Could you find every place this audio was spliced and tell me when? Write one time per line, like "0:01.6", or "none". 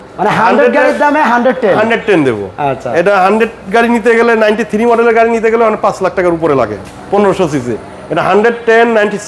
none